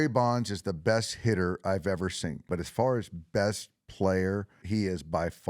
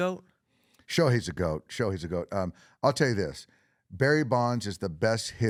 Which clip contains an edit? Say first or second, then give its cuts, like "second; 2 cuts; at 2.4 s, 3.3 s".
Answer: first; 2 cuts; at 2.5 s, 4.5 s